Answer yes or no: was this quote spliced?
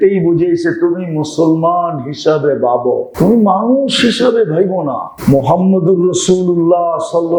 yes